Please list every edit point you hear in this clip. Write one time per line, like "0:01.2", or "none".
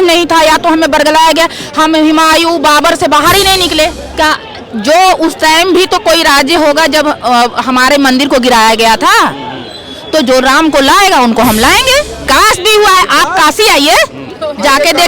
0:04.0
0:12.3